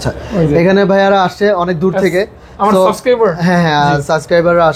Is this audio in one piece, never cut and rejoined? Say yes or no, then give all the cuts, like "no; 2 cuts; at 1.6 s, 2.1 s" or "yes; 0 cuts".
yes; 0 cuts